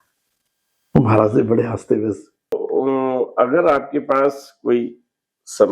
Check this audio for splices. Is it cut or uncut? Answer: cut